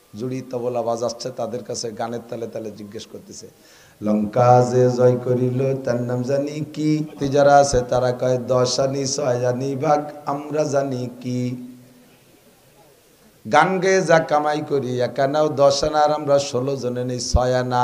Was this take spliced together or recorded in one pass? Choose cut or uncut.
cut